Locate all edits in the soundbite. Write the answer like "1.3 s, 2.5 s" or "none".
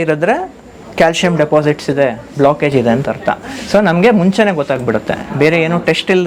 none